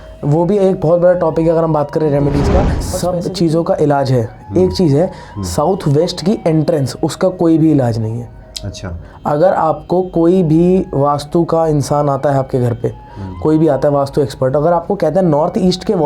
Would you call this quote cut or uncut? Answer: cut